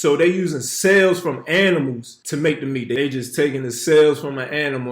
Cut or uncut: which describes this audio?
cut